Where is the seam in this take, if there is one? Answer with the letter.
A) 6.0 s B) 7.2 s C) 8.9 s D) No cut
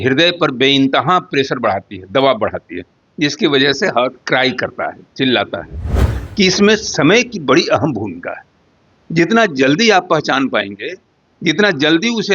A